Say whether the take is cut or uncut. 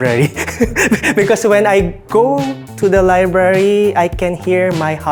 uncut